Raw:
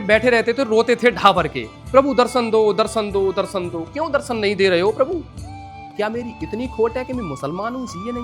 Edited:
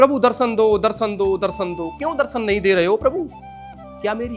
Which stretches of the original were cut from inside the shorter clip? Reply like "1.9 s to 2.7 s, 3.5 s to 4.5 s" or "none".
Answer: none